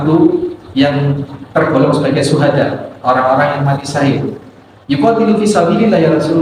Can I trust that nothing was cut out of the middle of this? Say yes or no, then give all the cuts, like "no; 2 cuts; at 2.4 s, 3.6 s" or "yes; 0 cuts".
yes; 0 cuts